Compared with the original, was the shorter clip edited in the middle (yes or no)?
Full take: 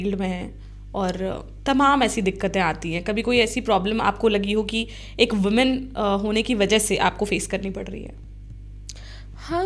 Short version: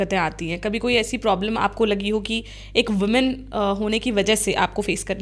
no